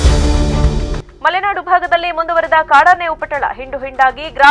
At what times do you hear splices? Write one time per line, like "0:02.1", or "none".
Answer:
none